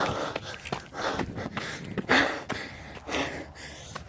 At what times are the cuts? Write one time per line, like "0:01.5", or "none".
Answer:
0:01.0
0:02.1
0:02.9

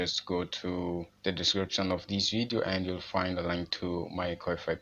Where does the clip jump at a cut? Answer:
0:01.1

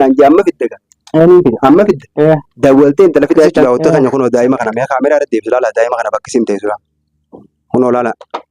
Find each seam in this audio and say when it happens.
0:03.6

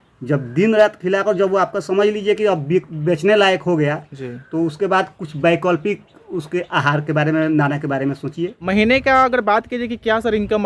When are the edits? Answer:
0:08.6

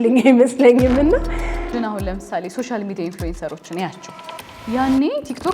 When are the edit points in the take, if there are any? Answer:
0:01.7

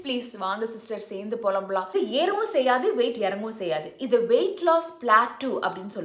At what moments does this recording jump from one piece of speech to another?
0:01.9

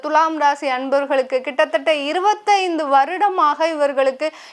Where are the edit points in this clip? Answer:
none

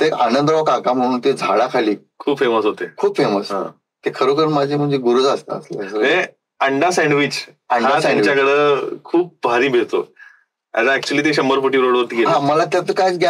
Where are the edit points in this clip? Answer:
none

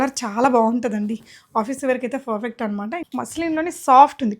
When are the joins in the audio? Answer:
0:03.0

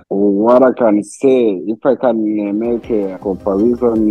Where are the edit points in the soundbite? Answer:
0:01.6
0:03.2

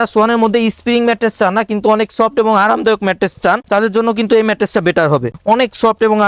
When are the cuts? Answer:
none

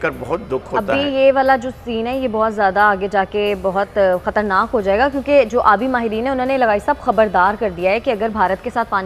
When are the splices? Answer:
none

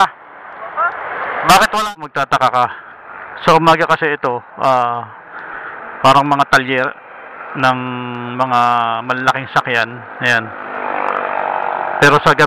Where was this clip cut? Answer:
0:01.9

